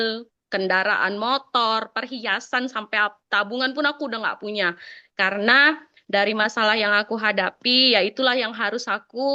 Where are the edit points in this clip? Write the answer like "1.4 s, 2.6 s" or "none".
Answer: none